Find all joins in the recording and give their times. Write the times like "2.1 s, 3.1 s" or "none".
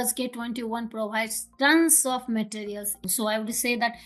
3.0 s